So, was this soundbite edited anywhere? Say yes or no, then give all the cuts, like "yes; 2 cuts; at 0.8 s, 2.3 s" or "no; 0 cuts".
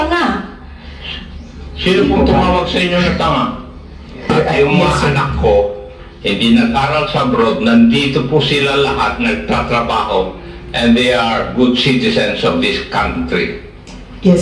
yes; 1 cut; at 4.3 s